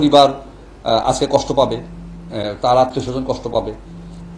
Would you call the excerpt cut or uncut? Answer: uncut